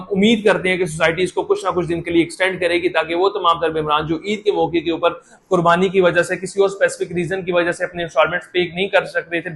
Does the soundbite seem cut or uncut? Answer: uncut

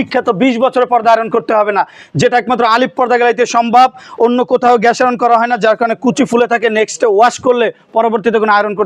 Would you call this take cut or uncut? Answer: uncut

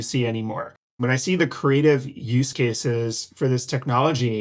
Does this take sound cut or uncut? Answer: cut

